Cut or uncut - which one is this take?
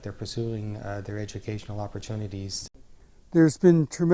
cut